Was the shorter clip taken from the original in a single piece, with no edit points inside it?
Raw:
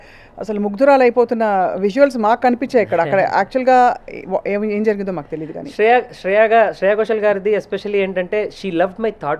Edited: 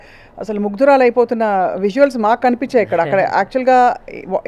yes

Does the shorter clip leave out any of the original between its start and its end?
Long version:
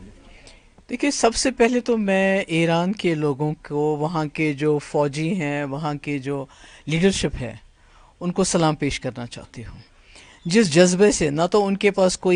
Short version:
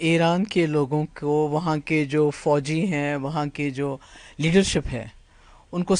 no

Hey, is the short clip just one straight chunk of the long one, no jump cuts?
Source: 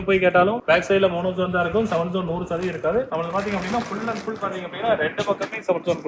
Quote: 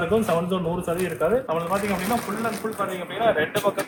yes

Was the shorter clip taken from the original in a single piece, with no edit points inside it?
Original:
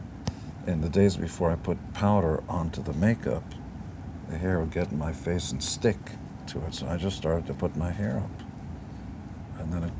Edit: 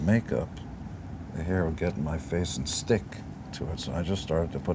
yes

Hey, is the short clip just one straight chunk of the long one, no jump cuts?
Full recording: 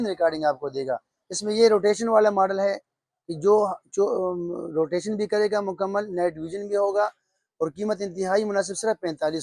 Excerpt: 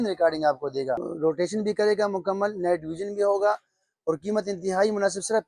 no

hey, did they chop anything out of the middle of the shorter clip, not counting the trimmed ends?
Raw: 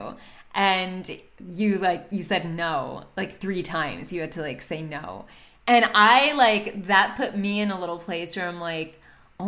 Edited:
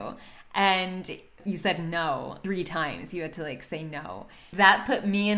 yes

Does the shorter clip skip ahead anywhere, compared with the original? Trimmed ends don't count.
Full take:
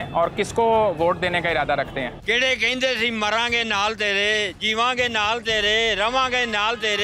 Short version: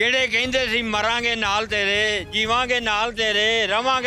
no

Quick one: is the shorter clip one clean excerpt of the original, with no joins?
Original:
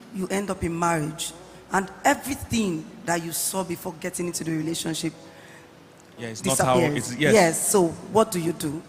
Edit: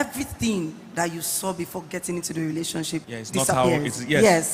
no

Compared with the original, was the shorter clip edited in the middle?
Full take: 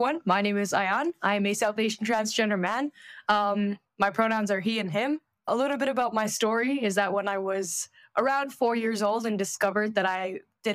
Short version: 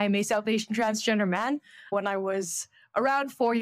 yes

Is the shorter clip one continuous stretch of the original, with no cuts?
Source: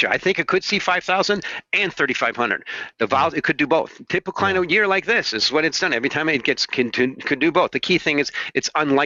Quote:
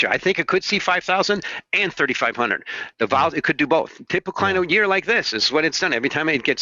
yes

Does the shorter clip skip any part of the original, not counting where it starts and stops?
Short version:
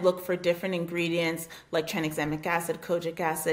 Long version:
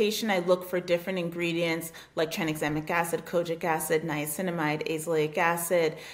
no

